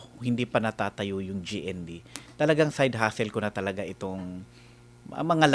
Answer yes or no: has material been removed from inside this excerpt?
no